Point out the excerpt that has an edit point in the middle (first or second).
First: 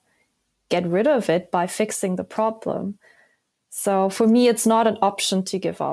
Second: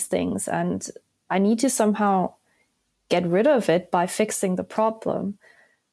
second